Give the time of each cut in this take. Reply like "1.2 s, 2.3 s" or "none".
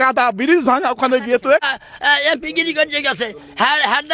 1.7 s